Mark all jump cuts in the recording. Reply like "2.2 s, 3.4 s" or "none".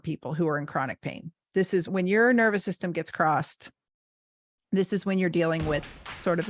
none